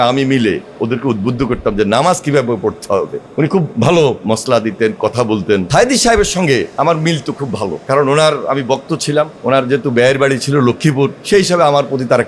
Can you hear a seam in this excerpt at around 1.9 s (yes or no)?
no